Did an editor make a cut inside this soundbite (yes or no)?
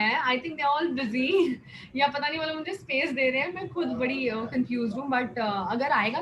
no